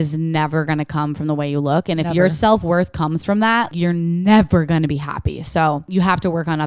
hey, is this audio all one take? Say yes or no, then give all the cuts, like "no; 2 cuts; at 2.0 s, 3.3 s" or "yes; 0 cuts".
no; 2 cuts; at 3.7 s, 5.8 s